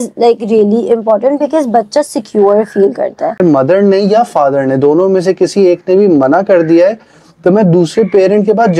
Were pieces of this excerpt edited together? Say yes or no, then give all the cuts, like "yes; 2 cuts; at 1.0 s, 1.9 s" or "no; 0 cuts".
yes; 1 cut; at 3.4 s